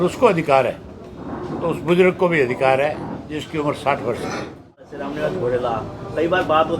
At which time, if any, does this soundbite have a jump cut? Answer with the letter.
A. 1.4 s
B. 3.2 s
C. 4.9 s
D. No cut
C